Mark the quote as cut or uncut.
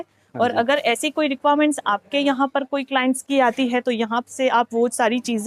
uncut